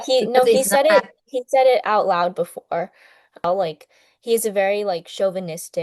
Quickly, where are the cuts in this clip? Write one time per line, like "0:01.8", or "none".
0:03.4